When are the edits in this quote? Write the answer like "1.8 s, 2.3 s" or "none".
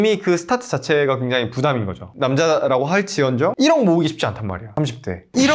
2.1 s